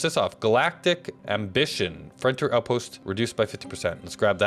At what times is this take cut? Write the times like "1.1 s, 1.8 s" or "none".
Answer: 1.1 s, 3.0 s